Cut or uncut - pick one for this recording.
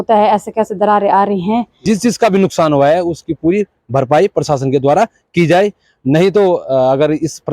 cut